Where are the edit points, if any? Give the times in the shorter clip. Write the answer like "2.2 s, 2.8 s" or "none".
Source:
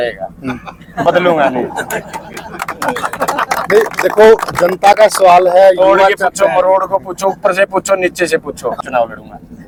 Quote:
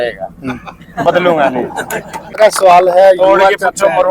2.4 s